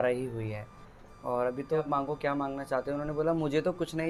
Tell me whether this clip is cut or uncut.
cut